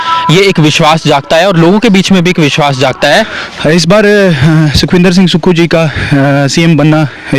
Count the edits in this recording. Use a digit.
1